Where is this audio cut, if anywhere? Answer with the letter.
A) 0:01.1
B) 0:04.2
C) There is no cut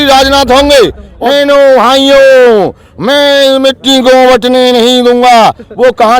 A